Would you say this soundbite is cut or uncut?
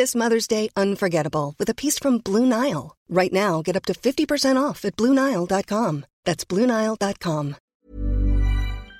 cut